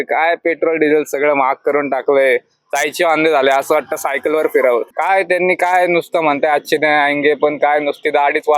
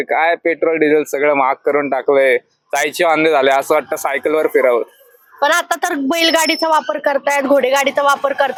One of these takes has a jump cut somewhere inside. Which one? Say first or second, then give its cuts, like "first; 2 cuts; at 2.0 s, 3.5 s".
first; 1 cut; at 4.9 s